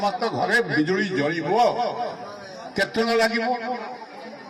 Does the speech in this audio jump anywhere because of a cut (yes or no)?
no